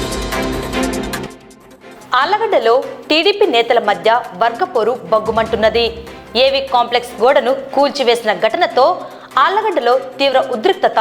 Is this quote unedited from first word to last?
no; 1 cut; at 1.2 s

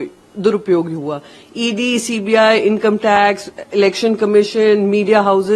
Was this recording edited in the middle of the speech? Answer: no; 0 cuts

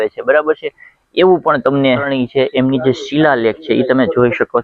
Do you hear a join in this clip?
yes; 1 cut; at 2.1 s

